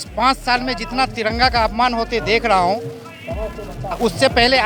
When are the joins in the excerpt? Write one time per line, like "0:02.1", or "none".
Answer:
none